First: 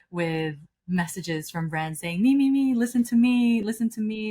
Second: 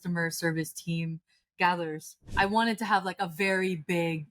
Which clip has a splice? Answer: second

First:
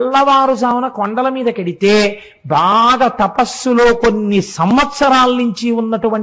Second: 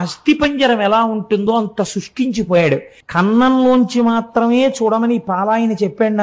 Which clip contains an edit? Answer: second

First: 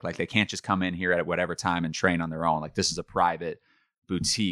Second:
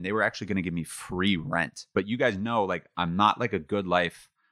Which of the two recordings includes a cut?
second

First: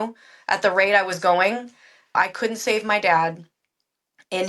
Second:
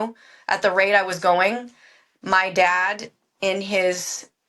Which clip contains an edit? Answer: first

